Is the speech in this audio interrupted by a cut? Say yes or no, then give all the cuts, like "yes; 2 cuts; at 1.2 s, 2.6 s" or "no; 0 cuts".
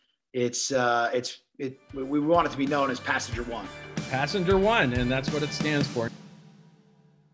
yes; 1 cut; at 6.1 s